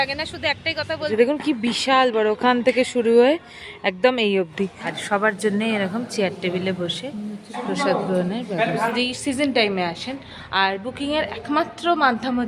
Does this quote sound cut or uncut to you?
cut